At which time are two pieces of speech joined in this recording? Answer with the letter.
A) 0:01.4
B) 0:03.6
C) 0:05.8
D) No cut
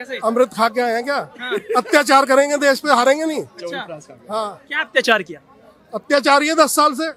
D